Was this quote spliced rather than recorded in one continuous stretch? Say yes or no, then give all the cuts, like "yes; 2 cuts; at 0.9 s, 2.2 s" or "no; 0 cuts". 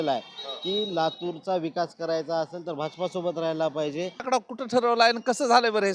yes; 1 cut; at 4.2 s